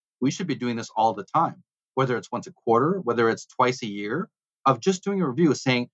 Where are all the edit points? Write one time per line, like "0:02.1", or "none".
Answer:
none